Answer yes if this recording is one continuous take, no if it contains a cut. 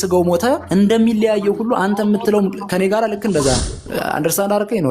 no